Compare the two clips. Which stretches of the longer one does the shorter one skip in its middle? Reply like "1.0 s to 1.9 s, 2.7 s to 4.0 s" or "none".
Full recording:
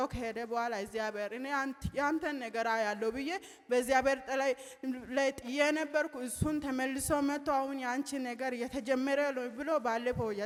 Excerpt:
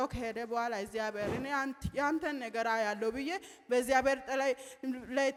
none